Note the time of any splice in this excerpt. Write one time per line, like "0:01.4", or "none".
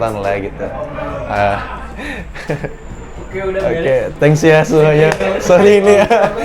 none

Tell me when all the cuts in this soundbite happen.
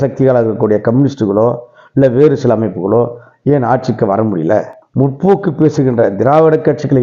none

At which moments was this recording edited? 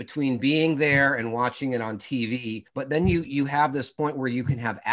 0:02.6
0:03.9

